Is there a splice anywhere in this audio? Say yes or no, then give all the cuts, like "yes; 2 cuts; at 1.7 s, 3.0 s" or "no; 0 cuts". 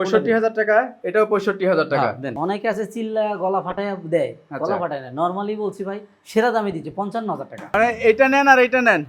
yes; 2 cuts; at 2.3 s, 7.7 s